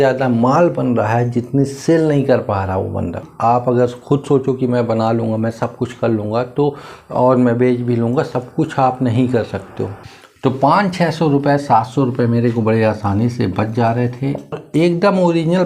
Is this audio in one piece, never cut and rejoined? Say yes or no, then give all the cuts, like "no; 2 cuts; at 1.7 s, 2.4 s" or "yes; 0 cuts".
no; 3 cuts; at 3.3 s, 10.0 s, 14.6 s